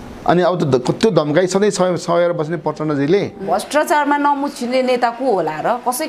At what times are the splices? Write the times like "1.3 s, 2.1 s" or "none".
3.4 s